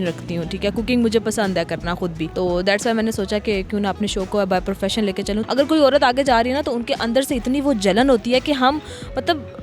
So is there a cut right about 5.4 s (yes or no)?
yes